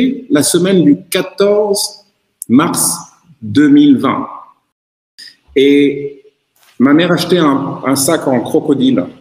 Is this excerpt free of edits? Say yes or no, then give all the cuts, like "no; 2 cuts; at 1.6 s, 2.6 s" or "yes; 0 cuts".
no; 1 cut; at 4.9 s